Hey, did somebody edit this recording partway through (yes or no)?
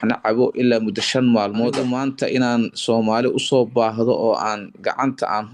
yes